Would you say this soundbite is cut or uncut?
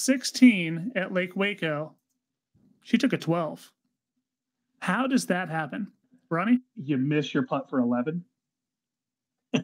cut